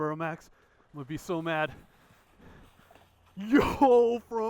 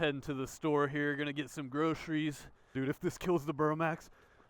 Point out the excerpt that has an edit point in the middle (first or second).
second